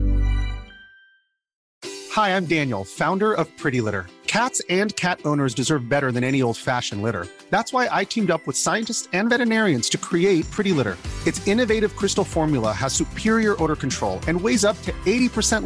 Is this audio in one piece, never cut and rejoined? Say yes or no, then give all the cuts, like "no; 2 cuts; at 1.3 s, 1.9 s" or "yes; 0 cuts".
no; 1 cut; at 1.7 s